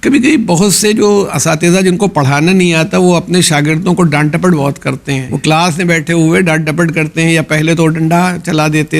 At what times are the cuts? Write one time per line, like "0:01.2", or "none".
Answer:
0:05.3